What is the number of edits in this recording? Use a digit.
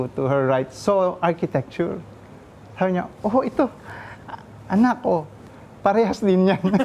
0